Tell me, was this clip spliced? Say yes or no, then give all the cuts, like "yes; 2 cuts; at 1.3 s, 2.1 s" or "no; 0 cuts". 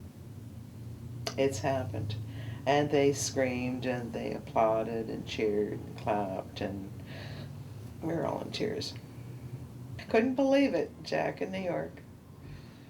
yes; 1 cut; at 10.0 s